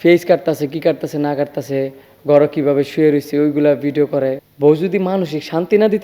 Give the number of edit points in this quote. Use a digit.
1